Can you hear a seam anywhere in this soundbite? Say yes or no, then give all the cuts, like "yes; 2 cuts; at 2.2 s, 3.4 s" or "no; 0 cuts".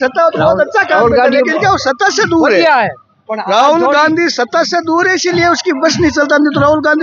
no; 0 cuts